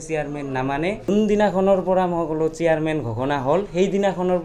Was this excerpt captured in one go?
no; 1 cut; at 1.0 s

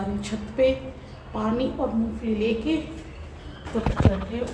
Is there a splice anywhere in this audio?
no; 0 cuts

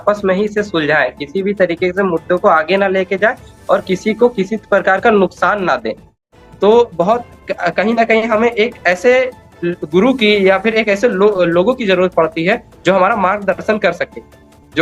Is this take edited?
yes; 1 cut; at 6.3 s

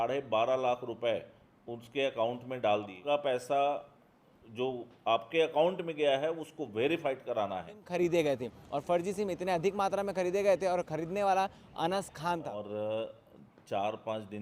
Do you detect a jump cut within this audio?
yes; 3 cuts; at 3.0 s, 7.9 s, 12.6 s

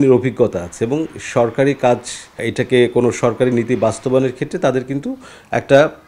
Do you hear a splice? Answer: yes; 1 cut; at 2.4 s

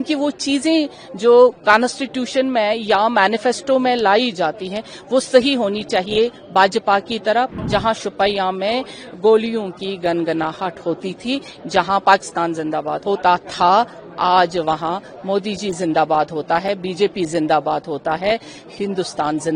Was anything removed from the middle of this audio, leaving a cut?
yes; 2 cuts; at 7.5 s, 12.9 s

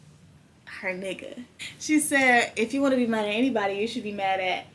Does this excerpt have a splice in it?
yes; 1 cut; at 1.7 s

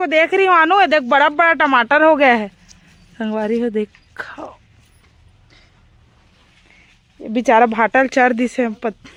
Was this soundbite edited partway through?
no; 0 cuts

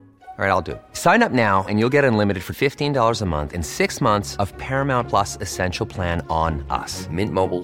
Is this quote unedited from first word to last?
yes; 0 cuts

